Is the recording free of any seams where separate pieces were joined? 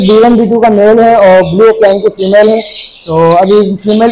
yes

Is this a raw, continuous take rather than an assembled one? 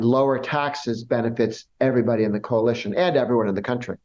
yes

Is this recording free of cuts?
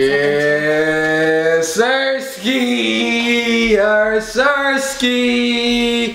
yes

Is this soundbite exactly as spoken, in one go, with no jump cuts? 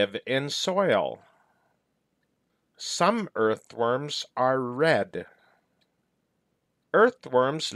no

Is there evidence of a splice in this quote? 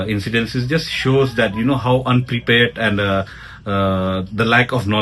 no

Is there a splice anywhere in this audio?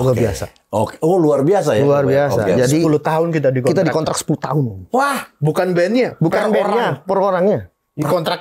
no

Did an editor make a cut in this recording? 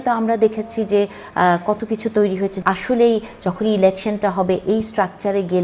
yes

